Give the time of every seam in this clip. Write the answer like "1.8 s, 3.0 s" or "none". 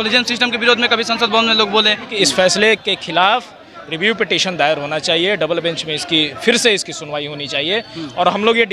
2.1 s